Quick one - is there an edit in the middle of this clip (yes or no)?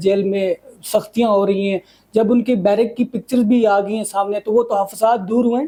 no